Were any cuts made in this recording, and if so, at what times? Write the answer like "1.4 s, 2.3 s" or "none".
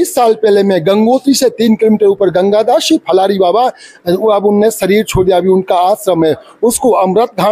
none